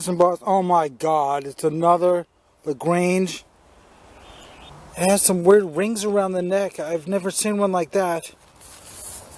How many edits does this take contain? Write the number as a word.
one